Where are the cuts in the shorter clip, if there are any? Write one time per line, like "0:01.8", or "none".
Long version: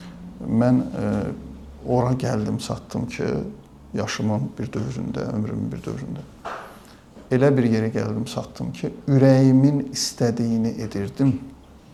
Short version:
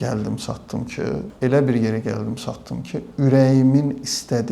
0:01.3